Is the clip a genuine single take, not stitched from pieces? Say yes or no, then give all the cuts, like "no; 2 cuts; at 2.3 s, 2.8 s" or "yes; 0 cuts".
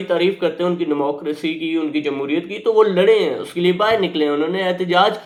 yes; 0 cuts